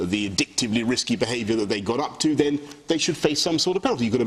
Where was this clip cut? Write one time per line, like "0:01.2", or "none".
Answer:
none